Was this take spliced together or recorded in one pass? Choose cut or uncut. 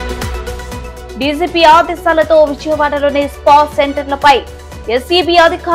cut